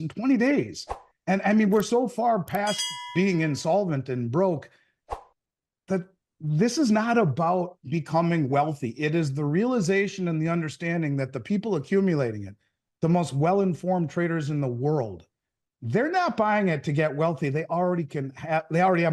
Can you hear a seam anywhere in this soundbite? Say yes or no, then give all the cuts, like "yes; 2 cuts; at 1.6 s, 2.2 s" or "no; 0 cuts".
no; 0 cuts